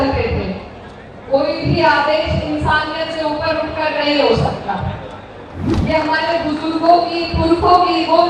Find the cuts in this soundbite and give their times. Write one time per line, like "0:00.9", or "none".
0:05.6